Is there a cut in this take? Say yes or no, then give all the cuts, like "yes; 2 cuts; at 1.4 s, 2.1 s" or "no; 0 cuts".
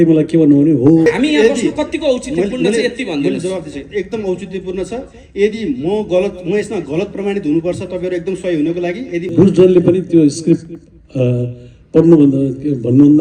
yes; 2 cuts; at 1.1 s, 9.3 s